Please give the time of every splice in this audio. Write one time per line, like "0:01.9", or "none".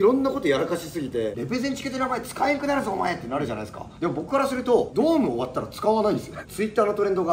0:01.3
0:06.4